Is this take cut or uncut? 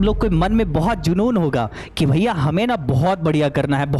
uncut